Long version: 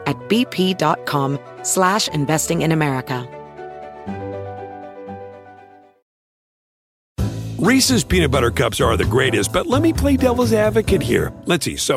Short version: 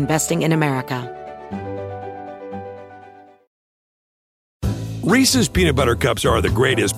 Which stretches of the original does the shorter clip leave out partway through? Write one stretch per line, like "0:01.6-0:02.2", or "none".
0:03.2-0:03.6